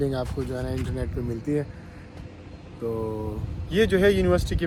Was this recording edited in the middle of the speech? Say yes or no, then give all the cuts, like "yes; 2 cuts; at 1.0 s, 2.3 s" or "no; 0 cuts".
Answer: no; 0 cuts